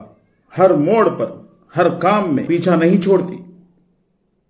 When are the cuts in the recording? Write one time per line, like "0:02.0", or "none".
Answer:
0:02.5